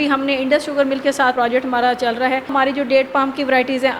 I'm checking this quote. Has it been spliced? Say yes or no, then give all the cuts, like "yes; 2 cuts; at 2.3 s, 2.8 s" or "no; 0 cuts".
yes; 2 cuts; at 1.3 s, 2.5 s